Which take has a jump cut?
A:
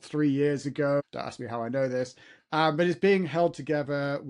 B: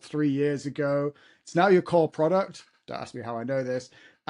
A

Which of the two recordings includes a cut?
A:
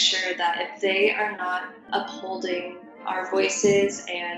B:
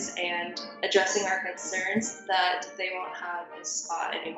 A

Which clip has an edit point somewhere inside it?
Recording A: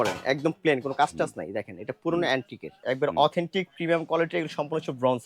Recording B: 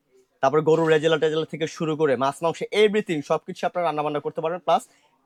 A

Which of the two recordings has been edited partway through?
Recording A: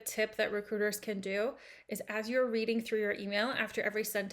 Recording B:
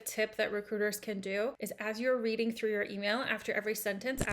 B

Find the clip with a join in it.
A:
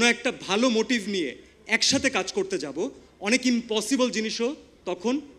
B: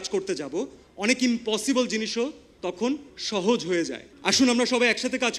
B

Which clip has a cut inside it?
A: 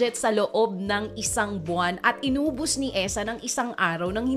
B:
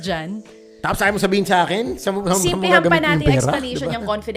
B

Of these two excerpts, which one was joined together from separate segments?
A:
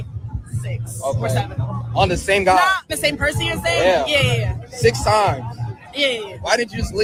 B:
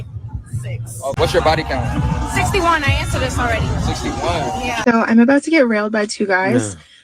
B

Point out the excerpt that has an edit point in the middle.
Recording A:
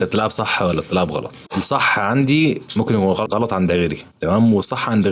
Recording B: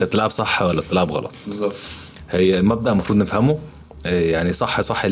A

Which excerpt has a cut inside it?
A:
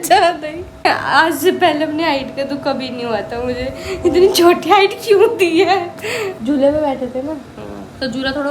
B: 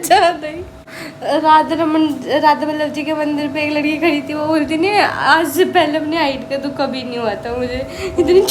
A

